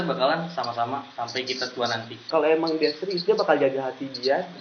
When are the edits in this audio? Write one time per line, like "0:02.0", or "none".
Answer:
0:02.2